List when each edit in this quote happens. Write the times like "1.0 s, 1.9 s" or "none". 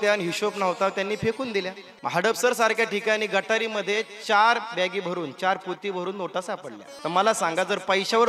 1.8 s, 6.8 s